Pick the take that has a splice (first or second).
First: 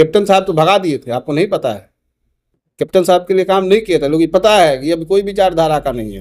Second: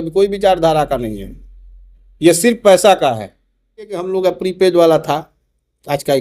second